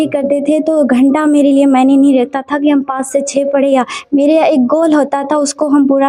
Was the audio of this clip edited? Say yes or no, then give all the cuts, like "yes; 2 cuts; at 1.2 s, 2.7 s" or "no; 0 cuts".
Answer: no; 0 cuts